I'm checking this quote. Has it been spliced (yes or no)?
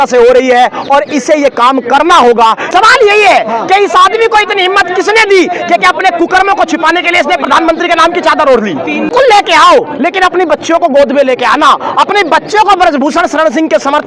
yes